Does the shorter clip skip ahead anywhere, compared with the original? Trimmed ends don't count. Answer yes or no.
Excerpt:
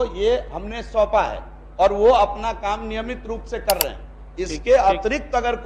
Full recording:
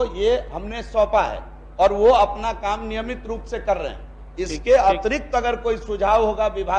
no